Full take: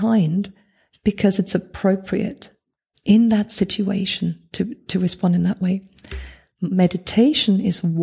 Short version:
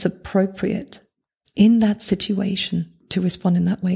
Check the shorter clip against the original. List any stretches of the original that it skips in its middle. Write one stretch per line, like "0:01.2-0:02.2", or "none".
0:04.5-0:04.8